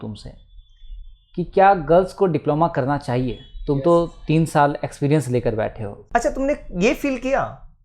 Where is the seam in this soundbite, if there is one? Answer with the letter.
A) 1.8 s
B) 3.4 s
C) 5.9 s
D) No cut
C